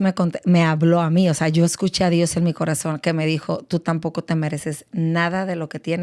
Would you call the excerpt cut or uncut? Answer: uncut